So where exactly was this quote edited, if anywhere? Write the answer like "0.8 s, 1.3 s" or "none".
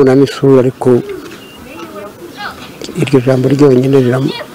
none